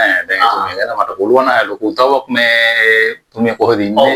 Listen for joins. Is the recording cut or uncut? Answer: uncut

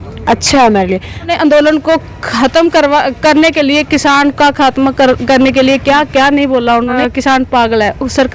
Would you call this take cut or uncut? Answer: cut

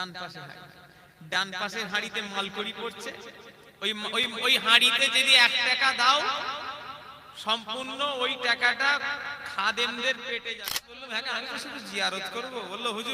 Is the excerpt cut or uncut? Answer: cut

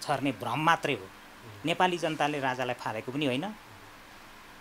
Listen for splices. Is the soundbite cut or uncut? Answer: uncut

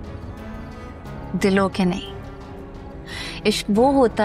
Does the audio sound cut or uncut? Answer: uncut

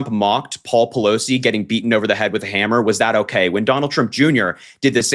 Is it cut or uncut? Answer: uncut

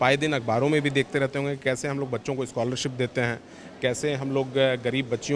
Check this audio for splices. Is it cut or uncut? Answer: uncut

